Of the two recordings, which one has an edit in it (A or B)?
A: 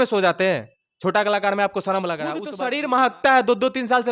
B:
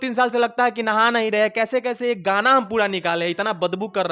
A